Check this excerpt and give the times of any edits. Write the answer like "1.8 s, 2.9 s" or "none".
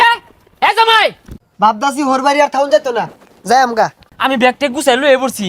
1.3 s, 4.0 s